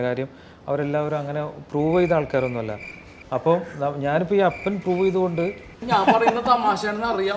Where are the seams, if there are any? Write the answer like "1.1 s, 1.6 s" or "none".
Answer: 5.8 s